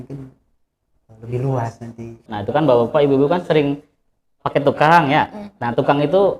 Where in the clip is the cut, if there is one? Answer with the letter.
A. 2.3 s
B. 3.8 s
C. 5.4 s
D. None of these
A